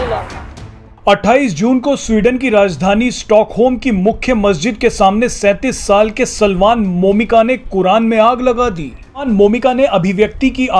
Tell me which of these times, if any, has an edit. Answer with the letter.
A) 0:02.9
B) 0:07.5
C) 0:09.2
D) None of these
C